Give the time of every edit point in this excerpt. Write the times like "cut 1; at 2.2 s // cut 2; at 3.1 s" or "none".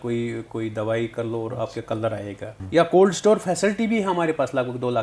cut 1; at 2.6 s